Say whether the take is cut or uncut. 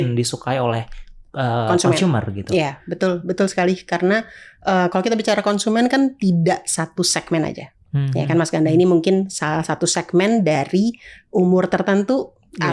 uncut